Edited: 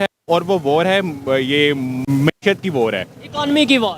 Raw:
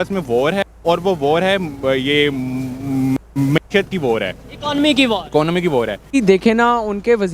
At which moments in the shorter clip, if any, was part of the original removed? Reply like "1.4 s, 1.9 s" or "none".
2.0 s